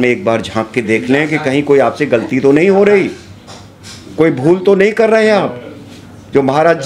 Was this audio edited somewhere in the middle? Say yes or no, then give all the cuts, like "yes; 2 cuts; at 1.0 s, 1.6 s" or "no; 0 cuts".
no; 0 cuts